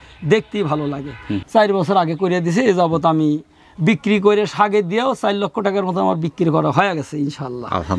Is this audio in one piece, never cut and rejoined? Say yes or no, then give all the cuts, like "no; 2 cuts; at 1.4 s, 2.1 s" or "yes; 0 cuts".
no; 1 cut; at 1.4 s